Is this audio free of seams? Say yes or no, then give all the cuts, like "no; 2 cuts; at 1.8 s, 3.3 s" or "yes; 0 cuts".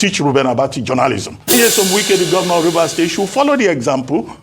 no; 1 cut; at 1.5 s